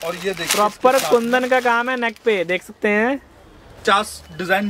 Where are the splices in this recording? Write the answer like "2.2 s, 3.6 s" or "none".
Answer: 3.8 s